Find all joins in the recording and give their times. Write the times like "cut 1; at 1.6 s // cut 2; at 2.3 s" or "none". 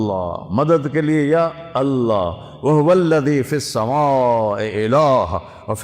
none